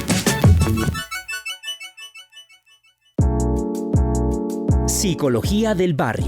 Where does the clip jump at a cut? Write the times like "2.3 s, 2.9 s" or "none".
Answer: 3.2 s